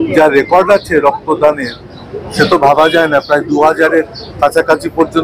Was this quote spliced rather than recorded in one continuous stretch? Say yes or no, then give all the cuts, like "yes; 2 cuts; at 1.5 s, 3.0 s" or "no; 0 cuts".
no; 0 cuts